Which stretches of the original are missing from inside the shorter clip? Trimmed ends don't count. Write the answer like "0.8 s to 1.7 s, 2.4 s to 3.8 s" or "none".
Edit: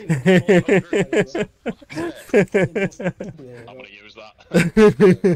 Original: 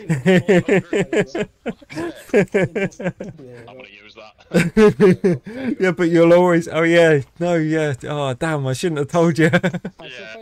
none